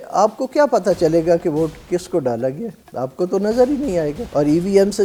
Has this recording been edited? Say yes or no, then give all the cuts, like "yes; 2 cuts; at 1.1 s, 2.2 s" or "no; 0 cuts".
no; 0 cuts